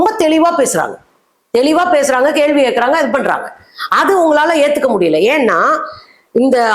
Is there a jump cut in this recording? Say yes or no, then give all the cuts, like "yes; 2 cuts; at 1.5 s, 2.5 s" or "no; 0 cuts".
no; 0 cuts